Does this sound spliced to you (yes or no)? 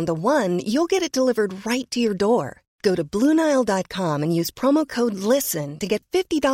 no